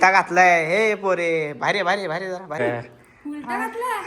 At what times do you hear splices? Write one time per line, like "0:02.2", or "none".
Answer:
0:02.6